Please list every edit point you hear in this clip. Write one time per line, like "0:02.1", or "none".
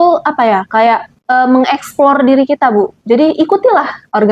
0:01.1